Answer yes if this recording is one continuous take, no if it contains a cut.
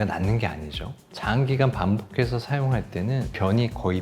no